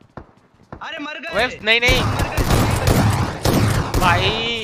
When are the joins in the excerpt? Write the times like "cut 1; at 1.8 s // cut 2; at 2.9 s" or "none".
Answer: none